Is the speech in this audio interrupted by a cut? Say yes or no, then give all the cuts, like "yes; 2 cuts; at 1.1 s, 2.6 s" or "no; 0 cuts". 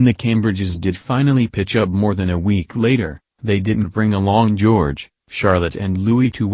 no; 0 cuts